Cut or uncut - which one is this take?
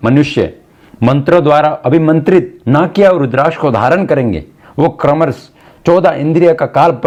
uncut